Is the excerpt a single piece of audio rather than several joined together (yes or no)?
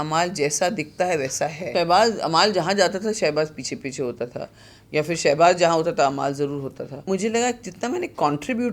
no